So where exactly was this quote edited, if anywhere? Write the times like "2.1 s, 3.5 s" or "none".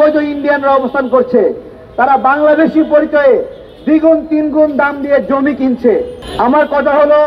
none